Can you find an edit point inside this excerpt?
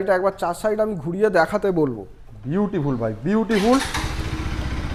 no; 0 cuts

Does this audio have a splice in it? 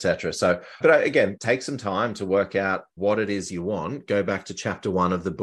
yes; 2 cuts; at 1.4 s, 2.9 s

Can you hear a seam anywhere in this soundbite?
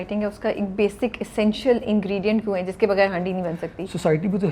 no; 0 cuts

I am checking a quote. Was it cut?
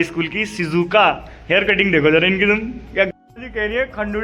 yes; 1 cut; at 3.1 s

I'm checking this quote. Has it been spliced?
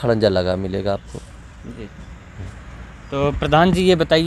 no; 0 cuts

